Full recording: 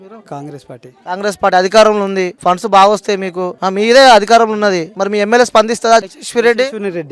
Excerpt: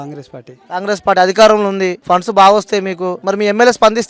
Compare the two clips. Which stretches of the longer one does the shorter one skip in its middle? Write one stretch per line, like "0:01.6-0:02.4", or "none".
0:03.5-0:04.9